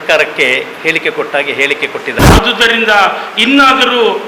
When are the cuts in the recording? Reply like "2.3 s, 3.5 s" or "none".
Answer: 2.2 s

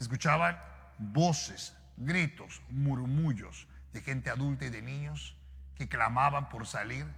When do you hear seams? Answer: none

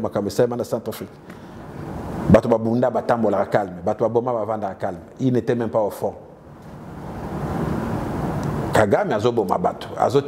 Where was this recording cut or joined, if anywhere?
none

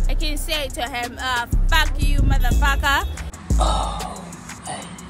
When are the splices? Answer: none

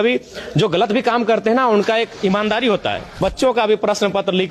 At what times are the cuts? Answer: 3.1 s

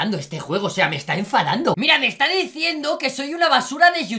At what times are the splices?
1.8 s

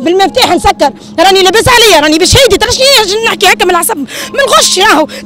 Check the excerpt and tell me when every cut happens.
none

